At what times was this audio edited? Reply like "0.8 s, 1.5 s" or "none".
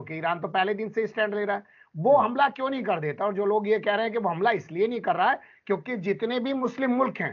none